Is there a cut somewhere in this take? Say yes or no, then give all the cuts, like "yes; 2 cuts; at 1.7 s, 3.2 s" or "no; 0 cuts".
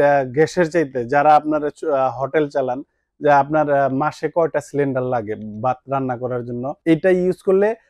yes; 1 cut; at 6.7 s